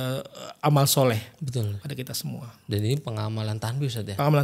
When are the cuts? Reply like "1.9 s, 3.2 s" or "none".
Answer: none